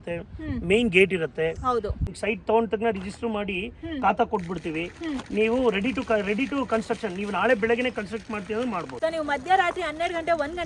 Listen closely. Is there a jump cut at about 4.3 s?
no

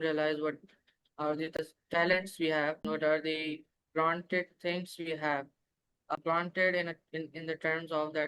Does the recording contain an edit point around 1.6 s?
yes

